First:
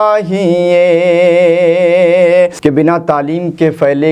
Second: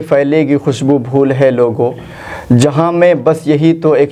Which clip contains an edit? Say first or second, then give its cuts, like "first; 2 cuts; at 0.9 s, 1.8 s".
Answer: first; 1 cut; at 2.6 s